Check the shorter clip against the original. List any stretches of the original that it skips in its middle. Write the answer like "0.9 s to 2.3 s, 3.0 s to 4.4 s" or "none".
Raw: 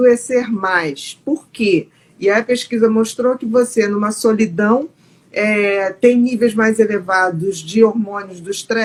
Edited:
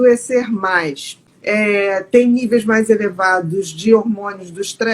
1.1 s to 5.0 s